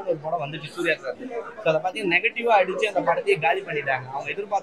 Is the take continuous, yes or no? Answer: yes